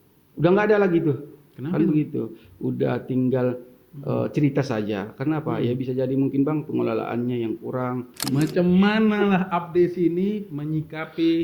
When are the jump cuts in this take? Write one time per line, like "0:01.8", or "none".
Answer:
0:08.2